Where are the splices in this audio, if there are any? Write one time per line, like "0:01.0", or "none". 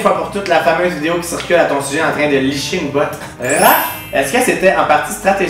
0:03.3